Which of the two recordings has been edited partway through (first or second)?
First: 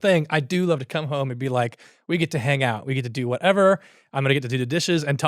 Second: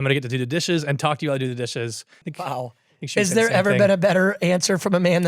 second